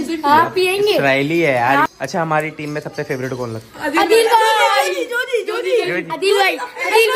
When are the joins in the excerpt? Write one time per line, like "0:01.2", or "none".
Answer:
0:01.9